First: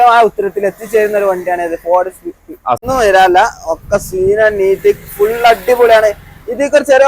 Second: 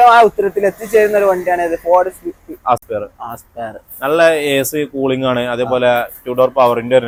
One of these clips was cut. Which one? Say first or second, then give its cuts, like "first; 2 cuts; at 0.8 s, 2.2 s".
first; 1 cut; at 2.8 s